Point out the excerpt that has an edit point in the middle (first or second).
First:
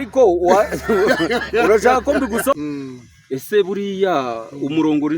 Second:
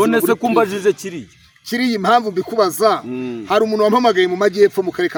first